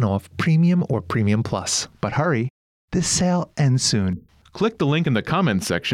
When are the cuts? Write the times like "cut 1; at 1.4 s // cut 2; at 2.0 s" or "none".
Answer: cut 1; at 1.8 s